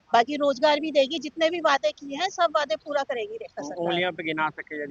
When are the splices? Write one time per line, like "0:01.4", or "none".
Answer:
none